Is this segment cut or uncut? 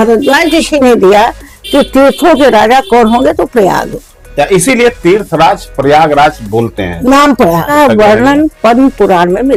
uncut